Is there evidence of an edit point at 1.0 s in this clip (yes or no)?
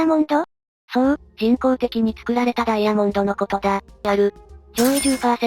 no